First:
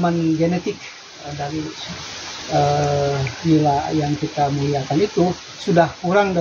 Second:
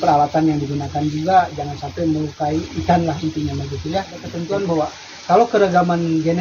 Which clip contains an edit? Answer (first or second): second